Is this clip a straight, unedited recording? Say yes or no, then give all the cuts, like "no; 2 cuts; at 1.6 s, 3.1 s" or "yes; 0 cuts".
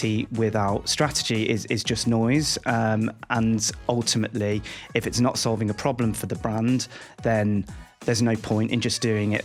yes; 0 cuts